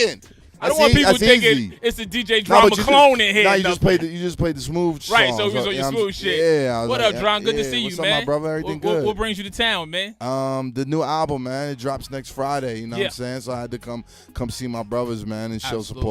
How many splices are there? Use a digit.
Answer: 1